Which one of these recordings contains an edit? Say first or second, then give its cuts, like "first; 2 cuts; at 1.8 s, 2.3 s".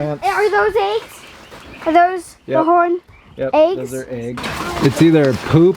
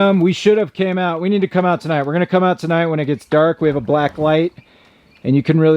first; 1 cut; at 4.4 s